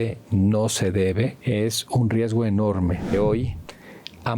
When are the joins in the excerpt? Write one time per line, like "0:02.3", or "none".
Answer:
0:01.4
0:03.1